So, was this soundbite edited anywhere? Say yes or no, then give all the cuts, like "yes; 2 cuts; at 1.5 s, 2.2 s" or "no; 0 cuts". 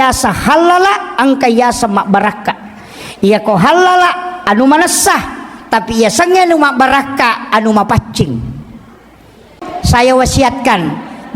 yes; 1 cut; at 9.7 s